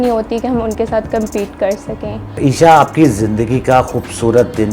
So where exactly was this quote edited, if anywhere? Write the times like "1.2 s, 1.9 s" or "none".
2.2 s